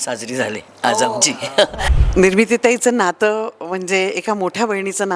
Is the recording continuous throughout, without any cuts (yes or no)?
no